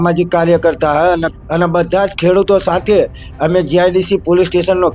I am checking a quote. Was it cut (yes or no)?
yes